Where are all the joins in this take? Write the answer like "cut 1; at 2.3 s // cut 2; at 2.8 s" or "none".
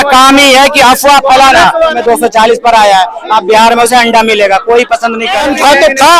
cut 1; at 1.9 s // cut 2; at 5.4 s